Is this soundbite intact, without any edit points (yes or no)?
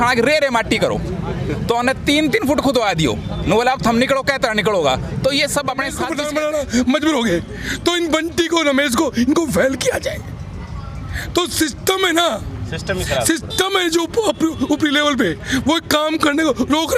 no